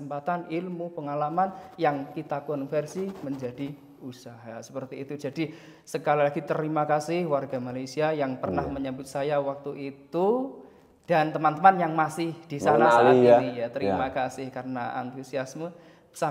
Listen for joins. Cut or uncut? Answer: uncut